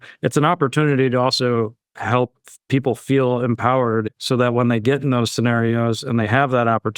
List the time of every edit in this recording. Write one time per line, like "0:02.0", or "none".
0:04.2